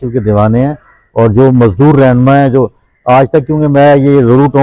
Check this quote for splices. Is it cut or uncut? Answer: uncut